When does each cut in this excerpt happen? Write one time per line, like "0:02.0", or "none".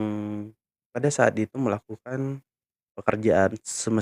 0:02.9